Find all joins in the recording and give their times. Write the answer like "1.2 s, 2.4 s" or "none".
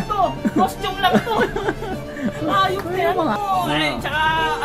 3.3 s